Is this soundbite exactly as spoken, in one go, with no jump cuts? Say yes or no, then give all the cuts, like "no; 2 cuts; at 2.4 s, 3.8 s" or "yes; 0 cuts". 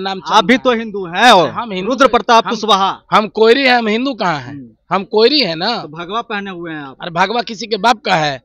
yes; 0 cuts